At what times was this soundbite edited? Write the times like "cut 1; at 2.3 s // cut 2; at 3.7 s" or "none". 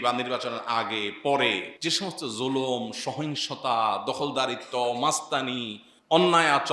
cut 1; at 1.7 s

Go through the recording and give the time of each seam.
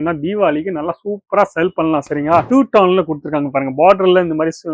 cut 1; at 2.5 s

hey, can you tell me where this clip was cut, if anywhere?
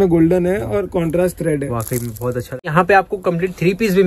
cut 1; at 2.7 s

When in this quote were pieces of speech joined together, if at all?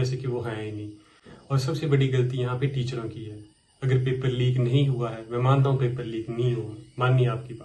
none

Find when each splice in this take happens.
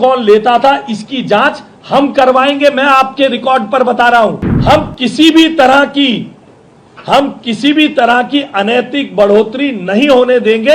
cut 1; at 4.5 s

